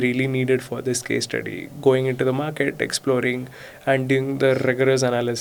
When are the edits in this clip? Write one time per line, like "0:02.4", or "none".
none

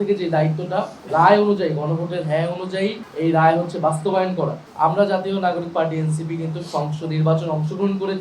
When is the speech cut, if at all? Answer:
0:01.0
0:03.0
0:04.6

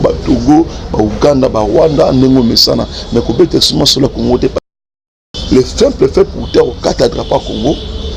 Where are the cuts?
0:04.8

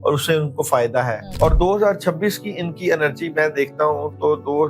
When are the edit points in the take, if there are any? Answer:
0:01.2

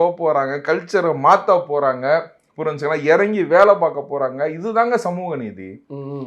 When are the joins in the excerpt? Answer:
none

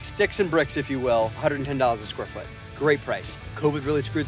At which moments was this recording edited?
none

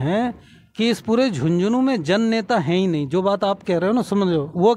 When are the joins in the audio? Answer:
none

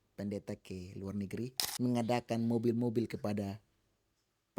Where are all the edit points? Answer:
0:01.6

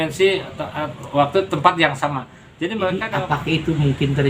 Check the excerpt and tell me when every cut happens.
0:03.0

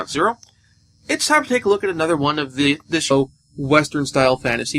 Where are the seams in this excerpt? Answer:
none

